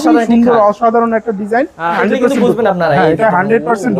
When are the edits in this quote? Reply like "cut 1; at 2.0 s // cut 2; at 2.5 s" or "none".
cut 1; at 2.0 s